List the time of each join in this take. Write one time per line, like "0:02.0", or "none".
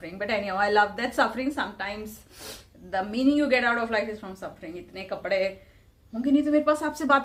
none